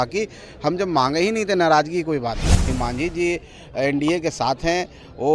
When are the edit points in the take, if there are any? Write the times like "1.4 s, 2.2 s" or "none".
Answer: 2.7 s